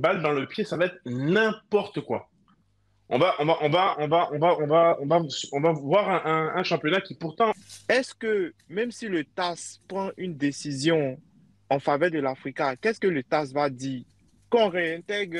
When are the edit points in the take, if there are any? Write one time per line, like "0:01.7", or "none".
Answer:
0:07.5